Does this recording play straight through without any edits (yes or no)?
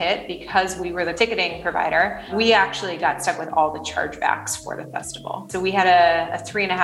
no